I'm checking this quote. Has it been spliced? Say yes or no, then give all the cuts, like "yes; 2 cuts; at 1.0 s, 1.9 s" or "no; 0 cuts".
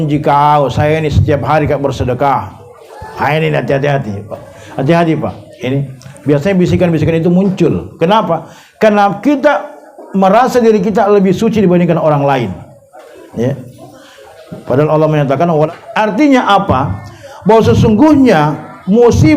yes; 1 cut; at 15.7 s